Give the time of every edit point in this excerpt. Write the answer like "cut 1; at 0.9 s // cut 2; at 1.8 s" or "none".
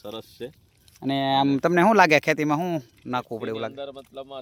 none